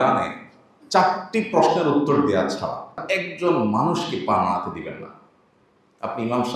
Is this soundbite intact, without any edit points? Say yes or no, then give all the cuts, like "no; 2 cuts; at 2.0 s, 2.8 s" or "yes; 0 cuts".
no; 1 cut; at 3.0 s